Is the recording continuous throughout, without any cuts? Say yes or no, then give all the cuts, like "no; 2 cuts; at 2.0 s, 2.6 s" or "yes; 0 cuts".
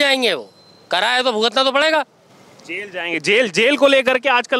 yes; 0 cuts